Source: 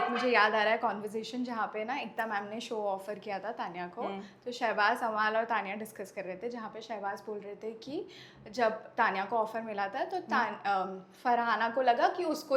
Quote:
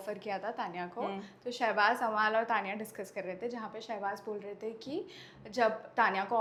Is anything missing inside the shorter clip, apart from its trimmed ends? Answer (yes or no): no